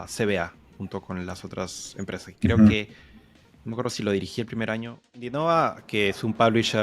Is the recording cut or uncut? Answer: cut